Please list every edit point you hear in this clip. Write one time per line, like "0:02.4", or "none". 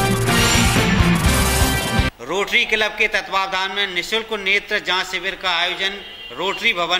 0:02.0